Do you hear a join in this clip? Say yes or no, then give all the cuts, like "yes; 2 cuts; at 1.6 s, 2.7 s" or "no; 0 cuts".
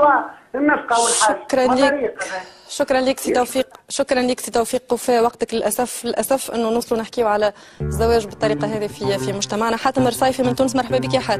no; 0 cuts